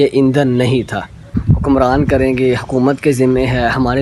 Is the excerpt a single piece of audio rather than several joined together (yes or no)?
no